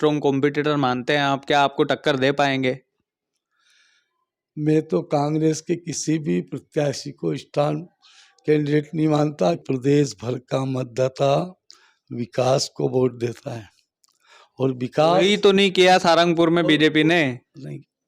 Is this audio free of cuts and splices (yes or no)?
no